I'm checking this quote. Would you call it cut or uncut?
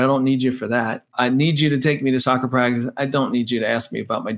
cut